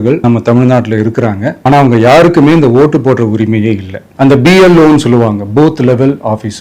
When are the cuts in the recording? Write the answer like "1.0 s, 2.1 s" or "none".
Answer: none